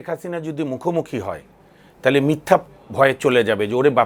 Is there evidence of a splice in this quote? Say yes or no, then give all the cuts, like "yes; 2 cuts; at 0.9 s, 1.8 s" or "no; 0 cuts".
no; 0 cuts